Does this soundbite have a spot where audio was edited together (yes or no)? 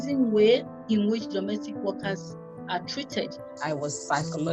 yes